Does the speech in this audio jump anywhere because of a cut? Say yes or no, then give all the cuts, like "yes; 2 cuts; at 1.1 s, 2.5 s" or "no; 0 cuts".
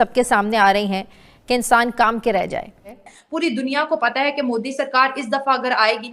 yes; 1 cut; at 3.1 s